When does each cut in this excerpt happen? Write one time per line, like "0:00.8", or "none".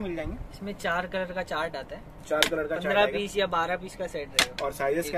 none